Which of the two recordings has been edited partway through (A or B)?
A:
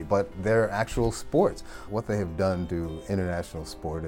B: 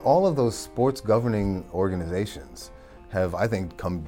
A